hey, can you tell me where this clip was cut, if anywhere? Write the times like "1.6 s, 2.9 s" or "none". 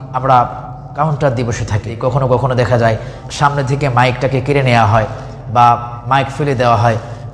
1.9 s, 3.2 s